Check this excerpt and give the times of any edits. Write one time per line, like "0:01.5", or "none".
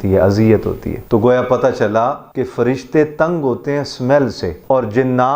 0:00.9
0:02.3
0:04.5